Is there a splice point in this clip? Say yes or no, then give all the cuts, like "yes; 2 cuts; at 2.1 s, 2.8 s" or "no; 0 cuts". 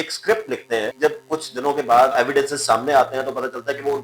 yes; 2 cuts; at 0.9 s, 2.1 s